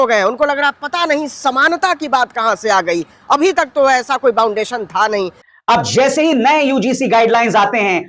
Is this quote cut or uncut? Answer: cut